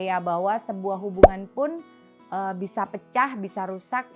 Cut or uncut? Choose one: uncut